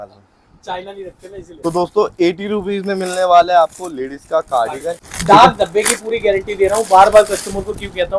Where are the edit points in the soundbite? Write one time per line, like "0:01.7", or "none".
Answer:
0:01.5
0:05.1